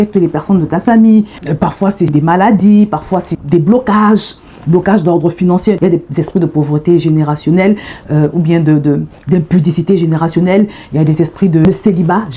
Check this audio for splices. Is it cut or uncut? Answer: cut